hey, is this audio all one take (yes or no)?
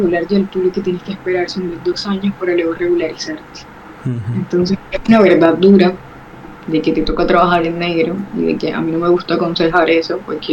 yes